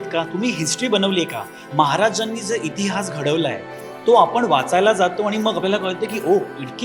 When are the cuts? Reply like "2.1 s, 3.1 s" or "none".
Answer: none